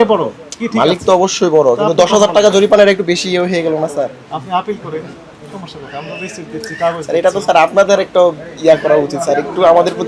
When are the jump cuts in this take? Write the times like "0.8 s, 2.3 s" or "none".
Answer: none